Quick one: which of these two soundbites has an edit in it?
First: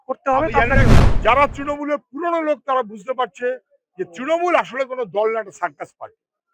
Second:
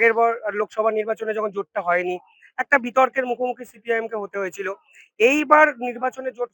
first; 1 cut; at 1.0 s

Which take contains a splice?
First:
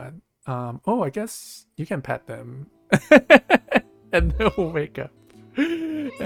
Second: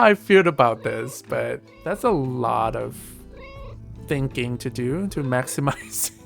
second; 1 cut; at 1.7 s

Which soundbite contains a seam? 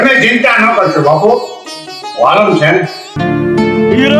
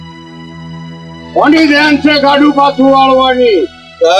first; 1 cut; at 3.1 s

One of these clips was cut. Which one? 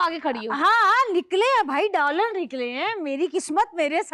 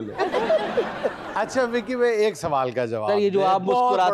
second; 1 cut; at 1.2 s

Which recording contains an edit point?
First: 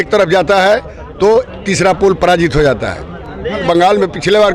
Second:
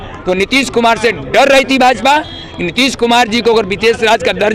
first; 1 cut; at 3.6 s

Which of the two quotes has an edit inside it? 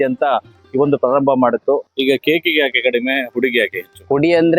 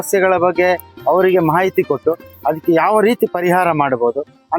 first; 1 cut; at 1.9 s

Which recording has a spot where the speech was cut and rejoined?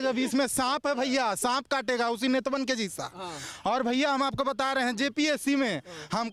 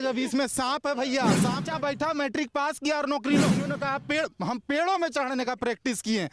second; 2 cuts; at 1.6 s, 3.7 s

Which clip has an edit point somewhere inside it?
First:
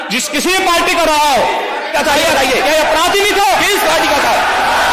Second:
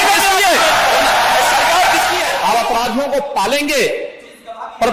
second; 1 cut; at 2.3 s

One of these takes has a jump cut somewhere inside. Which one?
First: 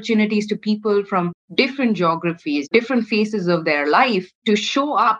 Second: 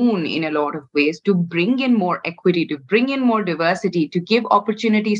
first; 3 cuts; at 1.4 s, 2.7 s, 4.3 s

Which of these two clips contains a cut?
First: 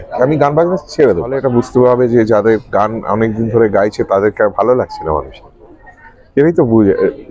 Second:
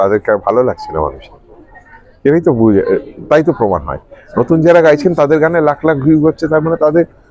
first; 1 cut; at 1.3 s

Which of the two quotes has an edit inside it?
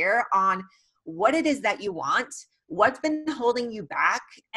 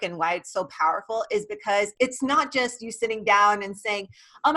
second; 1 cut; at 1.9 s

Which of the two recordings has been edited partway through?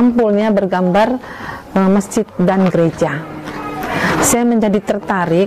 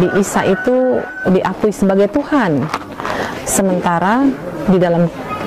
second; 1 cut; at 1.1 s

